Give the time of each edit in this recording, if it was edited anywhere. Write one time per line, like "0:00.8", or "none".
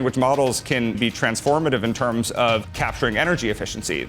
0:01.0
0:02.7

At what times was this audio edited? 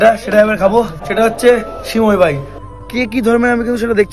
0:01.0
0:02.5

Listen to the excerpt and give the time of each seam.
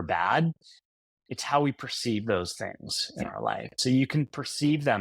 0:03.8

